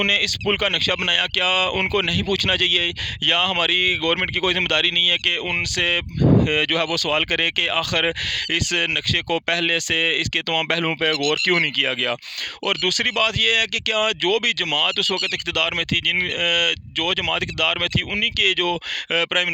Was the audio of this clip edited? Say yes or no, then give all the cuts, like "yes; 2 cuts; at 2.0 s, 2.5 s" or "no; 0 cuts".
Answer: no; 0 cuts